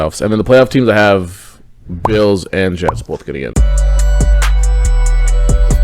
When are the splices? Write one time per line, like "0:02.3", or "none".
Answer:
0:03.5